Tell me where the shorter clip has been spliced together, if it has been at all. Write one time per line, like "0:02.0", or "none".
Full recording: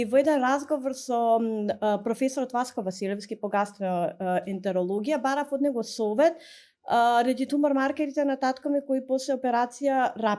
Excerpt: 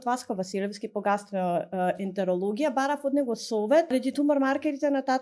0:03.9